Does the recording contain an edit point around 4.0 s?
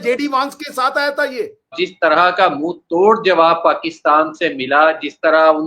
no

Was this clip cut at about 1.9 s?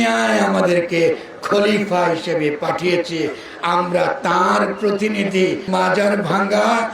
no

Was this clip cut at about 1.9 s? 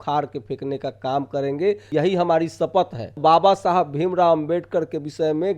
yes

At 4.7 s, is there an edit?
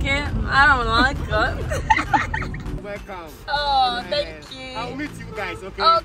no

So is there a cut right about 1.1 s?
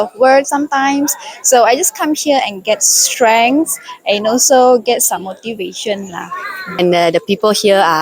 no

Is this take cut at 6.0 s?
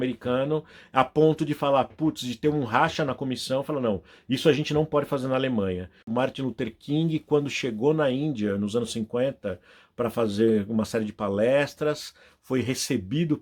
yes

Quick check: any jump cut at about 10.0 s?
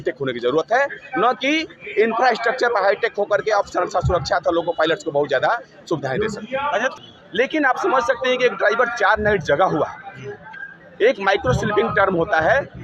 no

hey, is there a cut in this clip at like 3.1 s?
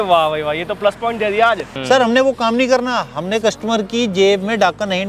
no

